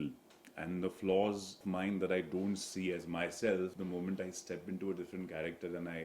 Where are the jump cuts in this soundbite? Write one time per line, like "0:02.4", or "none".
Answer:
0:01.5
0:03.8